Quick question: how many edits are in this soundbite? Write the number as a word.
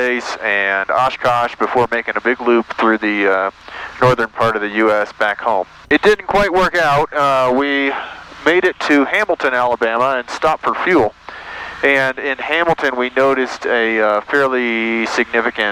zero